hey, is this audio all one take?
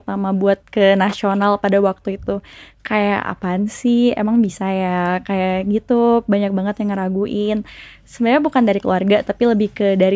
yes; 0 cuts

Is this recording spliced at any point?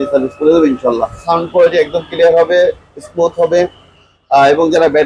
yes; 1 cut; at 1.2 s

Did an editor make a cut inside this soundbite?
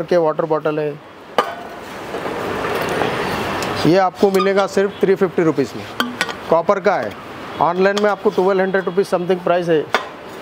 no; 0 cuts

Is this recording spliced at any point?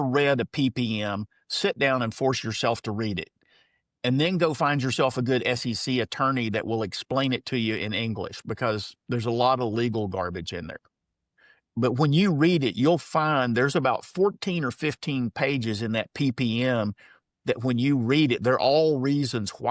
no; 0 cuts

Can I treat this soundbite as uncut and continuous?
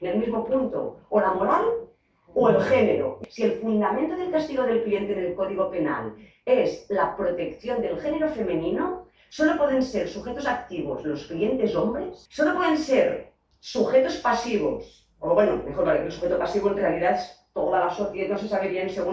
no; 2 cuts; at 3.2 s, 12.2 s

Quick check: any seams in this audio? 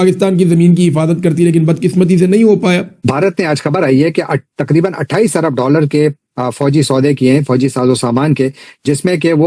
yes; 1 cut; at 3.0 s

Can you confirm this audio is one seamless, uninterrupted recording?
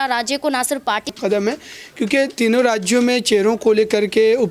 no; 1 cut; at 1.2 s

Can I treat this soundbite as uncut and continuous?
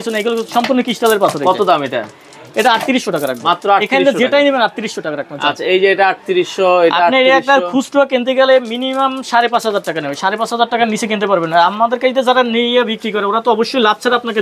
yes; 0 cuts

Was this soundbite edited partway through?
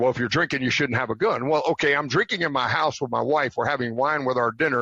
no; 0 cuts

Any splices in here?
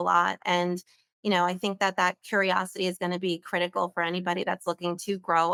no; 0 cuts

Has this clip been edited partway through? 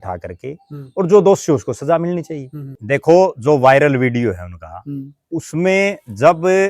yes; 1 cut; at 2.7 s

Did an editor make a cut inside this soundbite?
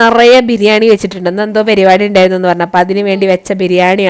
no; 0 cuts

